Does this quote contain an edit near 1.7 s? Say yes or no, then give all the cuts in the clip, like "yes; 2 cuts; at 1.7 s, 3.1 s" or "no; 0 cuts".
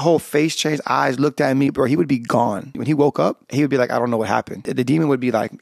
yes; 4 cuts; at 1.7 s, 2.8 s, 3.4 s, 4.7 s